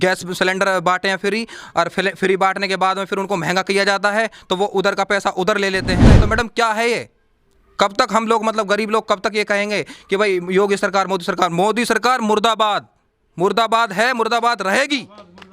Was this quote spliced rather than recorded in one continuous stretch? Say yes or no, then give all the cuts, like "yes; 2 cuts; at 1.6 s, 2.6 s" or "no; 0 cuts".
yes; 1 cut; at 6.1 s